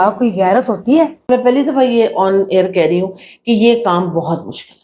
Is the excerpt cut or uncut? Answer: cut